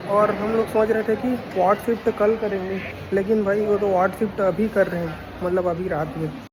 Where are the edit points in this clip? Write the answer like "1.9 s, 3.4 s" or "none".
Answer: none

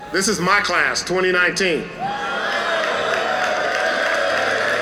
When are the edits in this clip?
none

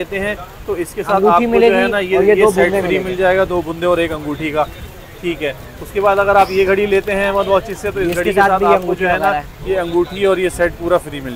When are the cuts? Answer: none

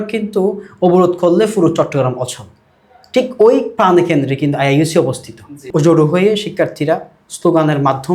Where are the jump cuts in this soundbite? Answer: none

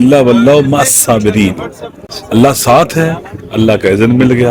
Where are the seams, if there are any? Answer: none

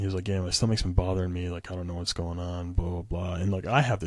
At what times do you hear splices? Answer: none

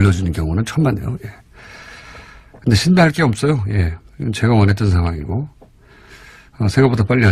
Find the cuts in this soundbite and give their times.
4.0 s

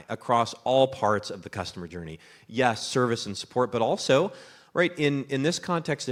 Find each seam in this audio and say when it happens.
none

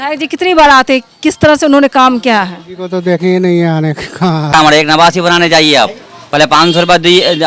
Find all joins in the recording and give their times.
4.5 s

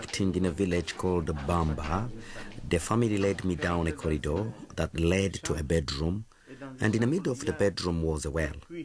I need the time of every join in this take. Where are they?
2.8 s

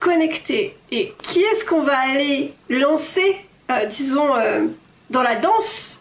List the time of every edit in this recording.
1.2 s, 2.6 s

